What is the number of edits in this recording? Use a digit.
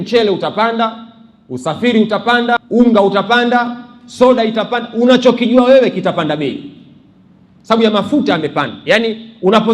1